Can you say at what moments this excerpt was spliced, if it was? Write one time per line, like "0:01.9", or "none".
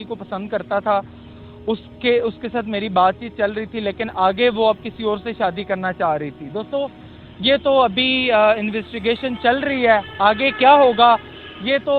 none